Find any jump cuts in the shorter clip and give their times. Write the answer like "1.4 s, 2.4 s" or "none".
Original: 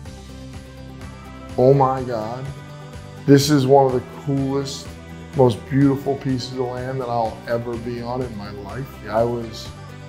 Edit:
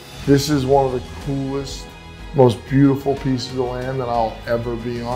none